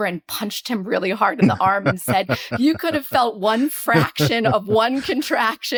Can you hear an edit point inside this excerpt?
no; 0 cuts

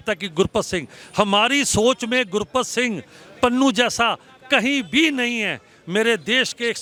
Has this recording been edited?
no; 0 cuts

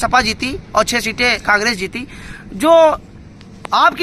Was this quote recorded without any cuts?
yes; 0 cuts

